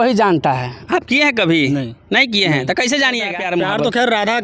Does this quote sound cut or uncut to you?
cut